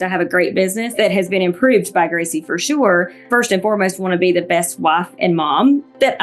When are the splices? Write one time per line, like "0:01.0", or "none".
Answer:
0:00.9
0:03.2